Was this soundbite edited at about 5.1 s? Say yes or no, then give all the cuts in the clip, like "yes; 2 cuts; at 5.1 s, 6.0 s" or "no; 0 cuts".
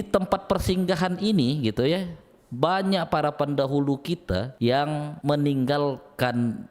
yes; 2 cuts; at 4.5 s, 5.1 s